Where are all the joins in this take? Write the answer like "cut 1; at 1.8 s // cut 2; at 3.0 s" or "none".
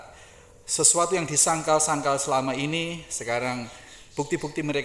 none

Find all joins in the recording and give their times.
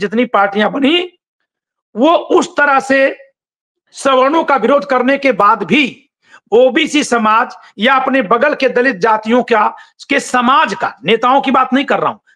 none

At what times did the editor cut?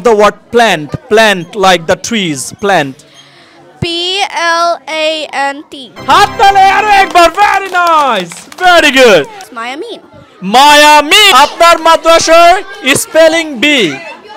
cut 1; at 9.4 s // cut 2; at 11.3 s

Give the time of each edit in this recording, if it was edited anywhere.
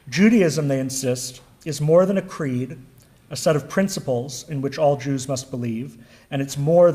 cut 1; at 5.9 s

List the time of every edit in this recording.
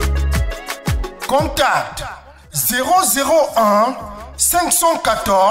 cut 1; at 1.0 s

